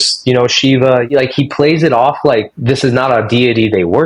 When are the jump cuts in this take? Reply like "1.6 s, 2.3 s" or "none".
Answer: 1.1 s, 2.5 s